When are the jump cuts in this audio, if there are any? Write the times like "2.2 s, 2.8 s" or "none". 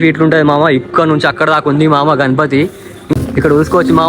3.1 s